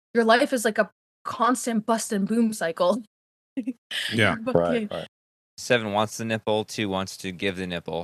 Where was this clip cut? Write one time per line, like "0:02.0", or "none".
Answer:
0:05.1